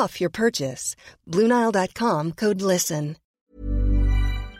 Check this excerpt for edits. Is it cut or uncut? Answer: cut